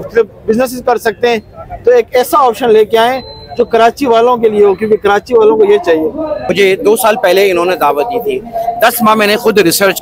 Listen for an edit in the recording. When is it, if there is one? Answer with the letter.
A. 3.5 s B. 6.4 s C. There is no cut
B